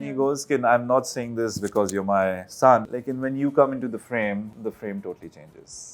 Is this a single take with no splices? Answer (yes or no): no